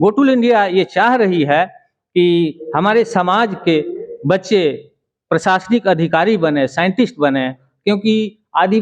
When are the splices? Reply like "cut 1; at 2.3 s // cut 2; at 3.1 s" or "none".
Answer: none